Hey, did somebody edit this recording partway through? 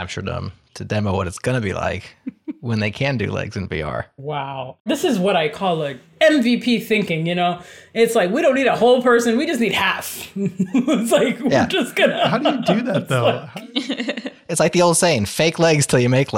no; 0 cuts

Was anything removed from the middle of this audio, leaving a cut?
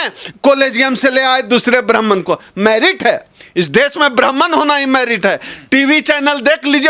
no; 0 cuts

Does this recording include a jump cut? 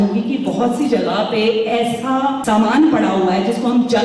yes; 1 cut; at 2.4 s

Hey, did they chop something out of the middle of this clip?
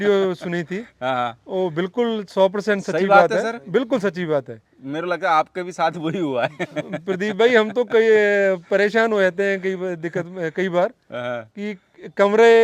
no; 0 cuts

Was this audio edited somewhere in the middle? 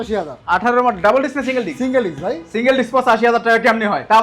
no; 0 cuts

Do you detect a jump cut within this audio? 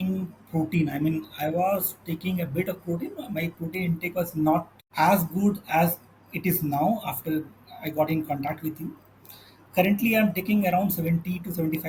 no; 0 cuts

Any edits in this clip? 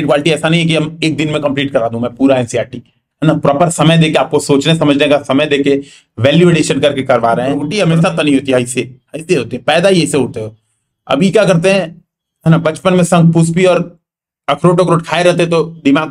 yes; 1 cut; at 7.6 s

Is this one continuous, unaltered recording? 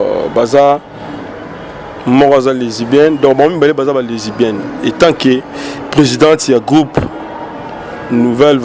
yes; 0 cuts

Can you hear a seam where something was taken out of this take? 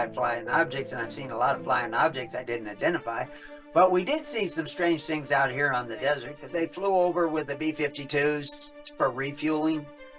yes; 1 cut; at 6.4 s

